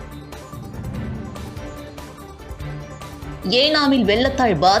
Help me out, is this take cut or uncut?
cut